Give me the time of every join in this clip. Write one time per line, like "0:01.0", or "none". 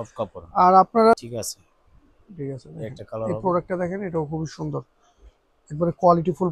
0:01.2

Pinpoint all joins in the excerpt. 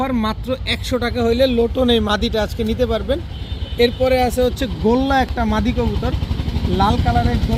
none

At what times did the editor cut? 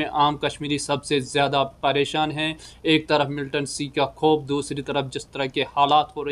none

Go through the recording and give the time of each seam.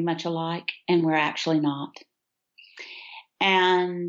none

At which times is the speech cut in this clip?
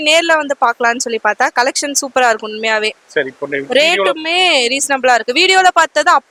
none

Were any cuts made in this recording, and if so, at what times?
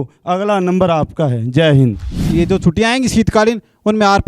0:02.2

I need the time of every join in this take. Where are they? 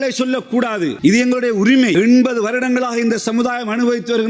0:00.9
0:02.0

